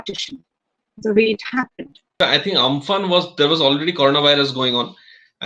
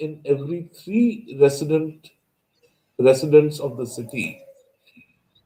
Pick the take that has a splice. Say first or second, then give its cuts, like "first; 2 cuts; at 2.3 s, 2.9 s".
first; 1 cut; at 2.1 s